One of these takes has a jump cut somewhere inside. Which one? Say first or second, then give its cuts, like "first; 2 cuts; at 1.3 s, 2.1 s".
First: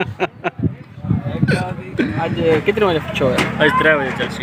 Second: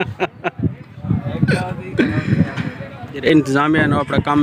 first; 1 cut; at 2.3 s